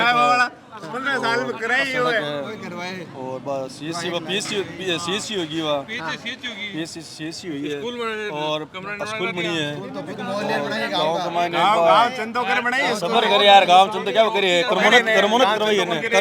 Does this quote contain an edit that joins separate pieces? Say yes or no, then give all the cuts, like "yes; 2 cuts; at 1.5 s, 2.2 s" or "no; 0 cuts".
no; 0 cuts